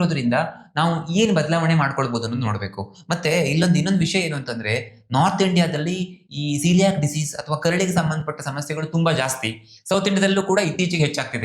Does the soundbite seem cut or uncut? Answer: uncut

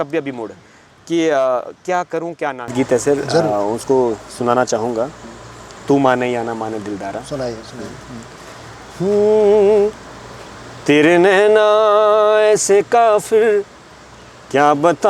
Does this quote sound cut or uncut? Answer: cut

